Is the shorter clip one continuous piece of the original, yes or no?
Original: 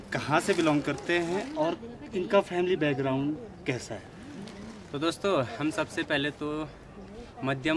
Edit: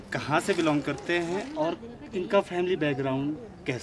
yes